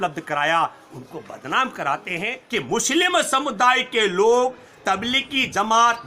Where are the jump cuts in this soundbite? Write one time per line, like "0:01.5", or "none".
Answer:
0:02.3